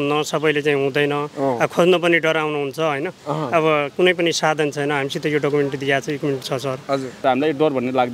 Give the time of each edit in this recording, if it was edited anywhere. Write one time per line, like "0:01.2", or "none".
0:07.1